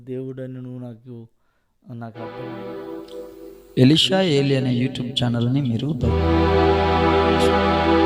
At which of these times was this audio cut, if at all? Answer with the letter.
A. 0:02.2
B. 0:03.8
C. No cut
A